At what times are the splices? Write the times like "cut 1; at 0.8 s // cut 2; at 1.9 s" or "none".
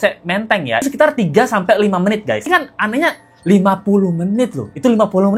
cut 1; at 0.9 s // cut 2; at 2.5 s